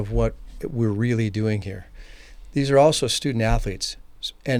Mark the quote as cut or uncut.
uncut